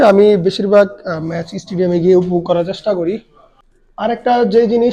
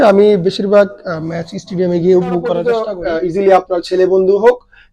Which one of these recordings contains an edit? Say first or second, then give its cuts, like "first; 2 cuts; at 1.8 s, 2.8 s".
second; 1 cut; at 2.8 s